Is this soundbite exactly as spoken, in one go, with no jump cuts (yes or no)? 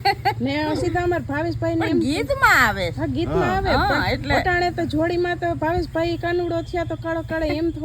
yes